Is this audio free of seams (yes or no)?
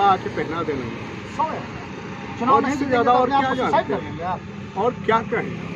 yes